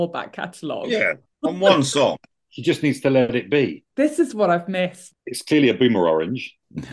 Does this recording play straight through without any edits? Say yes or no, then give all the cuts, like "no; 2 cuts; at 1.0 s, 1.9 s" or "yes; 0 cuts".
no; 2 cuts; at 3.8 s, 5.1 s